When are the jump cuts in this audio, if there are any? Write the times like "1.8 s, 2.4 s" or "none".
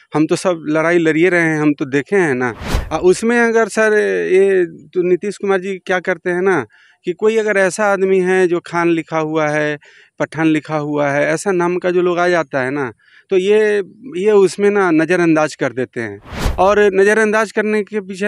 none